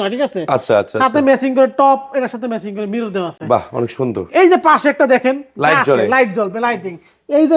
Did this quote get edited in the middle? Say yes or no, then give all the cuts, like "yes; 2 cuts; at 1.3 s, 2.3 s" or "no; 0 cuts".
no; 0 cuts